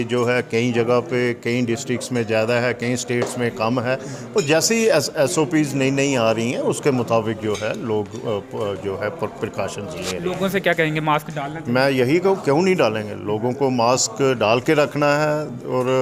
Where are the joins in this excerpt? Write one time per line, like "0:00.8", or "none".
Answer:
none